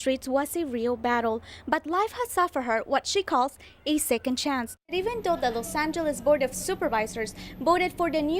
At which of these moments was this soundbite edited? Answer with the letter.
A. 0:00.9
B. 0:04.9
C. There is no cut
B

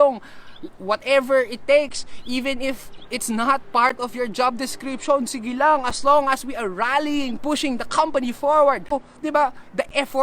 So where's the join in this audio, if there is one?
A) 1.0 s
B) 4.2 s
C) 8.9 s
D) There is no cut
C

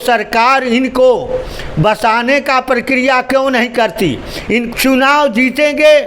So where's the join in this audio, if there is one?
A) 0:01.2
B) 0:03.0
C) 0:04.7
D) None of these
C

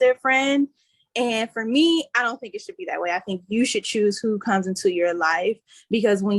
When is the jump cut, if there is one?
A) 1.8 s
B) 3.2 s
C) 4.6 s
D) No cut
D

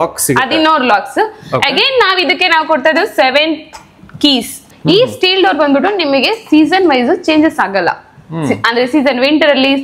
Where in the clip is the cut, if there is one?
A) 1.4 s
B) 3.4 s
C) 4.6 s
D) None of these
C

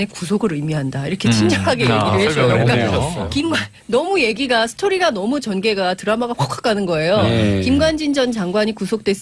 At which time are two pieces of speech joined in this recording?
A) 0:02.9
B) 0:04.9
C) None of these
B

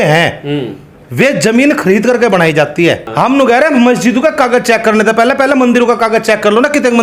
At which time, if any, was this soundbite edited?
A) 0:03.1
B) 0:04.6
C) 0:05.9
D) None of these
A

